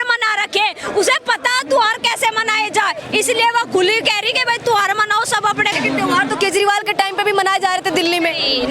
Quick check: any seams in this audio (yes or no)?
yes